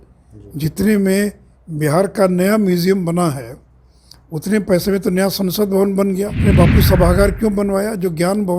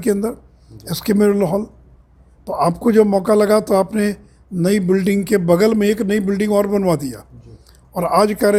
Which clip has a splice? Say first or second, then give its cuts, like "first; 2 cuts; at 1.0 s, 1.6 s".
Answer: first; 1 cut; at 6.4 s